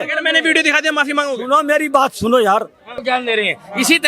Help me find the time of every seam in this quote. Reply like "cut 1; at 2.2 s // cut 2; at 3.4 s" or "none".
cut 1; at 3.0 s